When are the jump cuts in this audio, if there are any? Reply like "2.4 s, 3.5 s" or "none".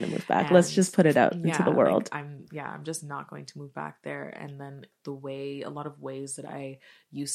4.9 s